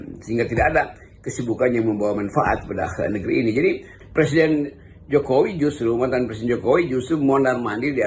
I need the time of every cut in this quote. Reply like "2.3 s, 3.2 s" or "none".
3.9 s